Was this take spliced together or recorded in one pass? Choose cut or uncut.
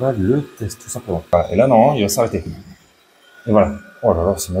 cut